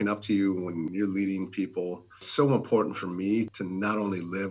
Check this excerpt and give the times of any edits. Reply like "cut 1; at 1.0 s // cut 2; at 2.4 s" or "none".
cut 1; at 0.9 s // cut 2; at 2.2 s // cut 3; at 3.5 s